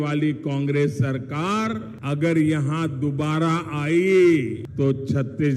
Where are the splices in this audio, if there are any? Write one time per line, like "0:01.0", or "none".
0:01.9
0:04.6